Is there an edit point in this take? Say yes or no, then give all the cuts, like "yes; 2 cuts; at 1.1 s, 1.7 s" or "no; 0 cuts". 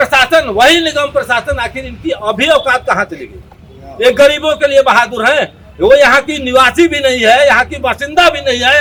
no; 0 cuts